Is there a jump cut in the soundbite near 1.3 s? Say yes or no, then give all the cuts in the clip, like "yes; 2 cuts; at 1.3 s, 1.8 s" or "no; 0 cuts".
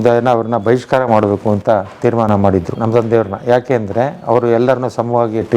no; 1 cut; at 2.7 s